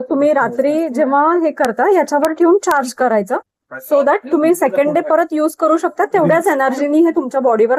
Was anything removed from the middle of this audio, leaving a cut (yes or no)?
no